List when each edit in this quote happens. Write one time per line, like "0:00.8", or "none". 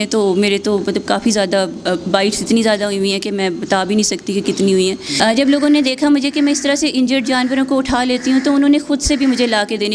0:05.1